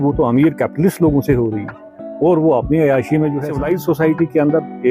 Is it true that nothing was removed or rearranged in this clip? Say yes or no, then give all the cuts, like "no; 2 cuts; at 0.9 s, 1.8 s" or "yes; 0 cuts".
no; 1 cut; at 3.5 s